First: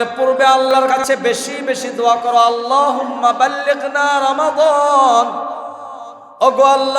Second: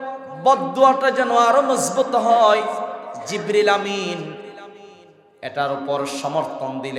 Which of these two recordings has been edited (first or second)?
first